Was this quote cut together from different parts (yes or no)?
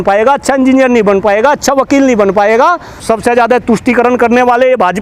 yes